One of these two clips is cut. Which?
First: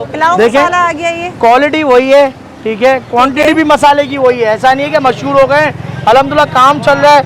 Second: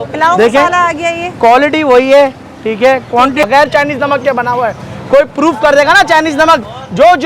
second; 1 cut; at 3.4 s

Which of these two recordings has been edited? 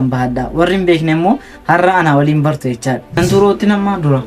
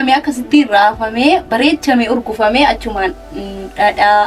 first; 1 cut; at 3.1 s

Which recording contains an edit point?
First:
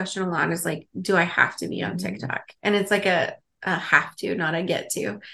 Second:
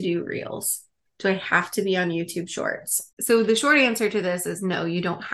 second; 1 cut; at 3.0 s

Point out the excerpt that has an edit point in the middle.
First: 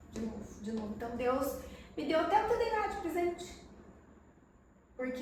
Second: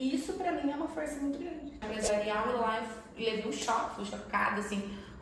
second; 1 cut; at 1.8 s

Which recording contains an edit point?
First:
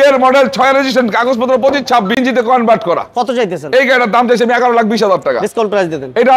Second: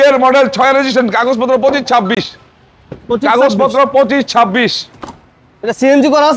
first; 1 cut; at 2.2 s

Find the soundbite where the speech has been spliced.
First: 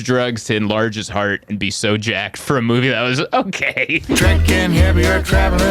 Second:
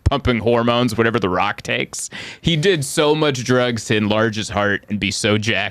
first; 1 cut; at 4.1 s

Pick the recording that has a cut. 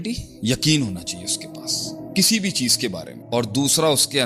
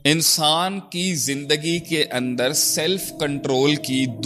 first; 1 cut; at 3.1 s

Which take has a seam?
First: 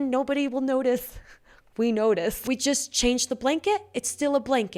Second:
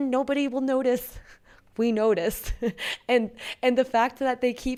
first; 1 cut; at 2.4 s

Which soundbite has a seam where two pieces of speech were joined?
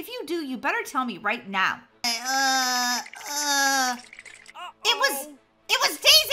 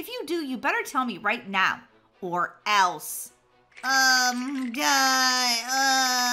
first; 1 cut; at 2.1 s

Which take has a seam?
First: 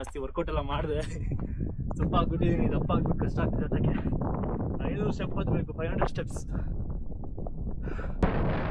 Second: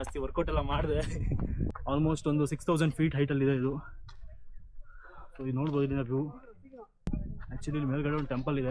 second; 2 cuts; at 1.7 s, 7.0 s

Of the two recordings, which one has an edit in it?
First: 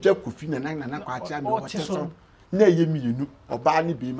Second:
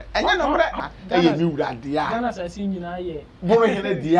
second; 2 cuts; at 0.7 s, 3.3 s

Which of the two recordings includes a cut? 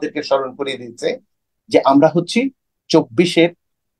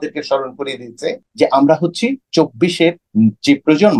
second; 3 cuts; at 1.2 s, 2.2 s, 3.0 s

